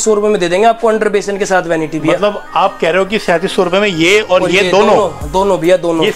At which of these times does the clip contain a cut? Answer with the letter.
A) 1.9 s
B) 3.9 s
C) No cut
C